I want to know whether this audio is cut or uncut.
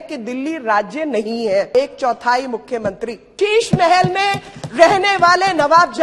cut